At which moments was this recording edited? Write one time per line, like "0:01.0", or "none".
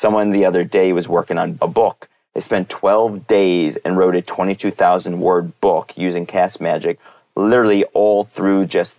0:01.6